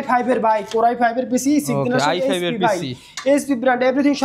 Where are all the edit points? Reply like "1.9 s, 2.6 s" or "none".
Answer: none